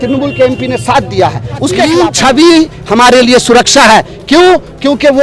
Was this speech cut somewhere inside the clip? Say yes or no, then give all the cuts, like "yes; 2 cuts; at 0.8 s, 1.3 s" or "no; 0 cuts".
yes; 1 cut; at 1.9 s